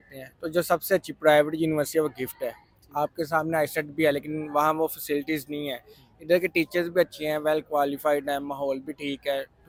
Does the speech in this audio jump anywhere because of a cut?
no; 0 cuts

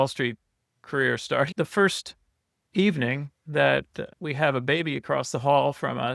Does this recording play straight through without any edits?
no; 2 cuts; at 1.5 s, 4.0 s

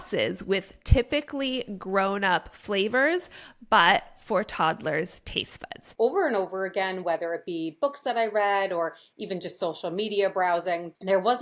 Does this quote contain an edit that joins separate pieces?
yes; 1 cut; at 5.8 s

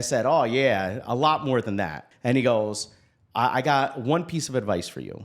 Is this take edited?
yes; 1 cut; at 2.1 s

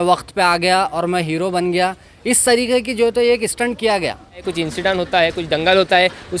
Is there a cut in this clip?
yes; 1 cut; at 4.5 s

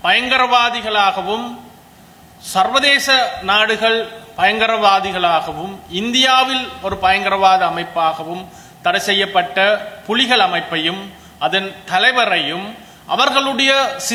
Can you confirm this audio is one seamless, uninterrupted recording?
yes; 0 cuts

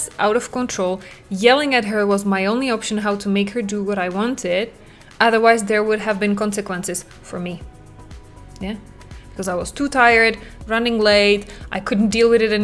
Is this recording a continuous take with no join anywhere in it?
yes; 0 cuts

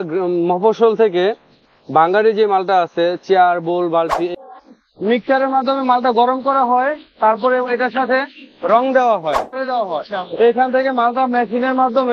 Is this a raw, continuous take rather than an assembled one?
no; 2 cuts; at 4.3 s, 9.6 s

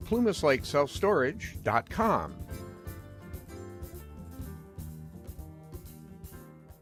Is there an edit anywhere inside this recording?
no; 0 cuts

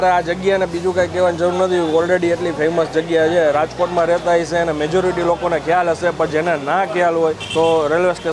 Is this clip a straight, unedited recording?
yes; 0 cuts

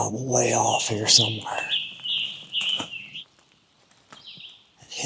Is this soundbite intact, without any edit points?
no; 1 cut; at 3.2 s

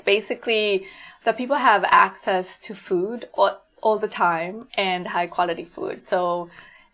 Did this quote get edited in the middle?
no; 0 cuts

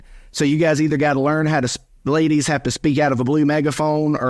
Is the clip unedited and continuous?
yes; 0 cuts

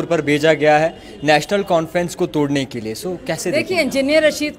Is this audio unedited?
yes; 0 cuts

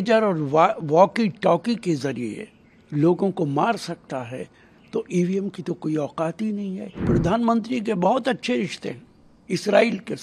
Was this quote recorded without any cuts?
no; 1 cut; at 7.0 s

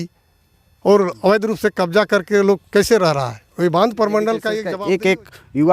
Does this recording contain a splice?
yes; 1 cut; at 4.7 s

